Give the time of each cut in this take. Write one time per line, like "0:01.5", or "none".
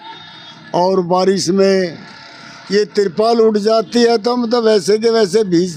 none